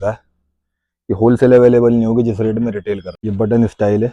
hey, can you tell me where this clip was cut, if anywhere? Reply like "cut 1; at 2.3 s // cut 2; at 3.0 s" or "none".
cut 1; at 3.1 s